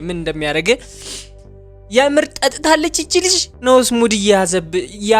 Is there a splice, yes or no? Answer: no